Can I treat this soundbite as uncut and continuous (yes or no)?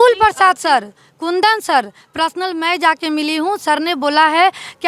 yes